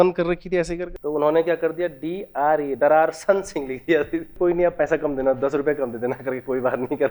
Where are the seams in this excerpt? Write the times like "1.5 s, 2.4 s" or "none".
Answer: 0.9 s, 4.3 s